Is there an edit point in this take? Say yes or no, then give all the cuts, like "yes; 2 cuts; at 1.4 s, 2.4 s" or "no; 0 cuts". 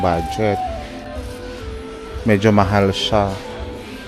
no; 0 cuts